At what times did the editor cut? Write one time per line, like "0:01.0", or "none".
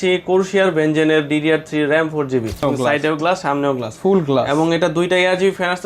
0:02.6